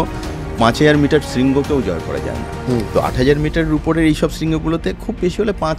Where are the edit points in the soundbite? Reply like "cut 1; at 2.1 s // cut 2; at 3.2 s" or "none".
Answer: cut 1; at 2.5 s